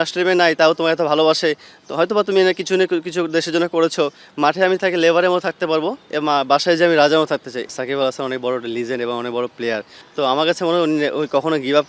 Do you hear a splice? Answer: yes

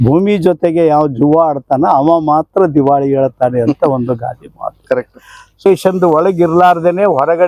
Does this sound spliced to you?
yes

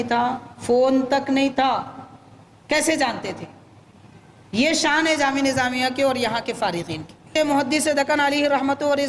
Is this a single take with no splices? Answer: no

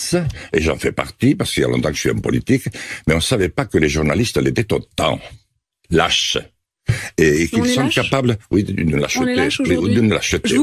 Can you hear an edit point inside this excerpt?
no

